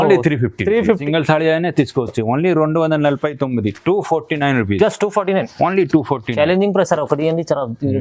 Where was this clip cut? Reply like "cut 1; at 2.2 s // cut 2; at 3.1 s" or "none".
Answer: cut 1; at 1.0 s